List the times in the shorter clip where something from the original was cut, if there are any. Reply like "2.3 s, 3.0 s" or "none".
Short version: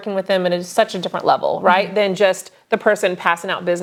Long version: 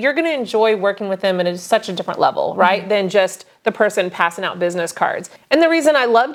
none